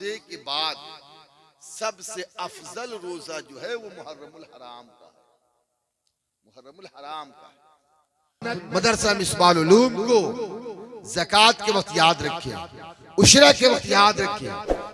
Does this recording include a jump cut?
yes; 1 cut; at 8.4 s

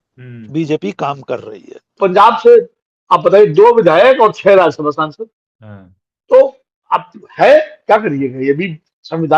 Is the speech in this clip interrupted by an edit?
yes; 1 cut; at 2.0 s

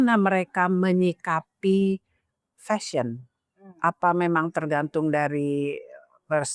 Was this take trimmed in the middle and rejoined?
no; 0 cuts

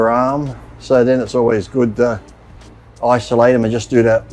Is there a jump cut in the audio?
no; 0 cuts

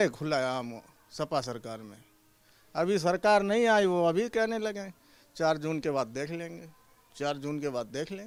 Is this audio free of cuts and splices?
yes; 0 cuts

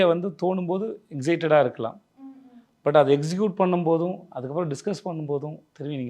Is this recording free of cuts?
yes; 0 cuts

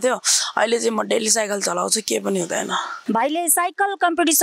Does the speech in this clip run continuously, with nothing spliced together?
no; 1 cut; at 2.9 s

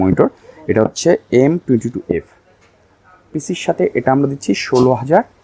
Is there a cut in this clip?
no; 0 cuts

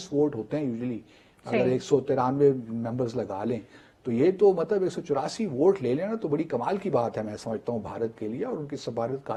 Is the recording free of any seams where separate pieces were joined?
yes; 0 cuts

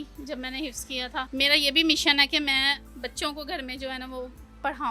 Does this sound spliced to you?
no; 0 cuts

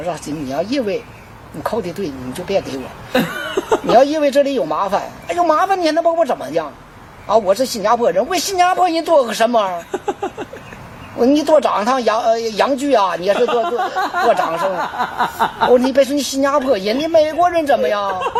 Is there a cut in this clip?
no; 0 cuts

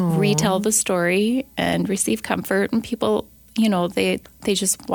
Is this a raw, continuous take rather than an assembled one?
yes; 0 cuts

